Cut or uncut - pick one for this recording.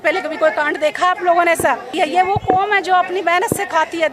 cut